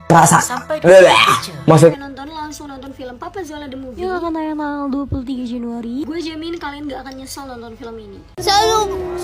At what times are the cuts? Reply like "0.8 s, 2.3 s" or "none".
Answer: 1.9 s